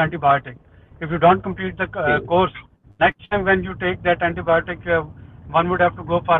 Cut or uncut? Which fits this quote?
uncut